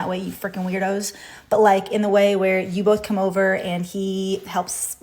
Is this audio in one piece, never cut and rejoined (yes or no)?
no